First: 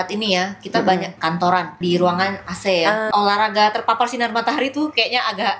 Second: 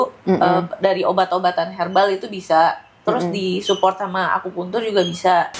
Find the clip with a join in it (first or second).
first